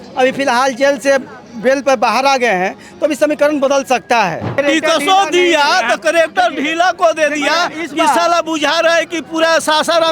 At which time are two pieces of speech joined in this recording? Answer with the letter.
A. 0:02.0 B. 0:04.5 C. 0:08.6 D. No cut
B